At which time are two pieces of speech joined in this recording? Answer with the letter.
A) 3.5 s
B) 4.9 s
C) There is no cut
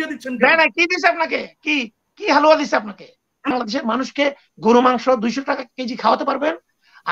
A